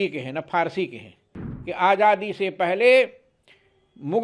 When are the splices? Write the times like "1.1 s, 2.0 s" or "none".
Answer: 1.3 s